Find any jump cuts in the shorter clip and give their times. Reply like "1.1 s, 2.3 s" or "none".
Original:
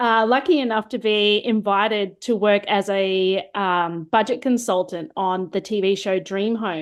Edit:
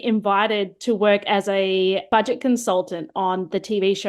2.0 s